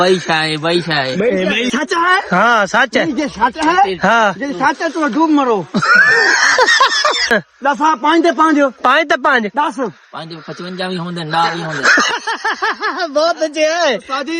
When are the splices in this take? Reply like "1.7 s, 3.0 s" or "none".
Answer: 1.7 s, 7.3 s